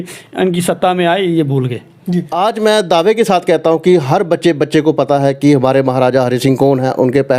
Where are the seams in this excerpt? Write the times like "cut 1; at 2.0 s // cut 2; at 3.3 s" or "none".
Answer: cut 1; at 2.3 s